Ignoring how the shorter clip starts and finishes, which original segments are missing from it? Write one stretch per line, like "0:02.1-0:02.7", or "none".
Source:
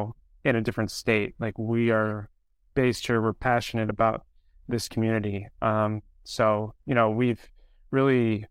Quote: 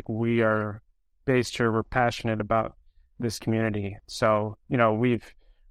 0:05.5-0:06.1